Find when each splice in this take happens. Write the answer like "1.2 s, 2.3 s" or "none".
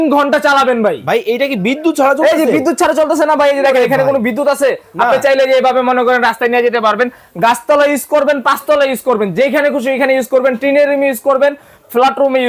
none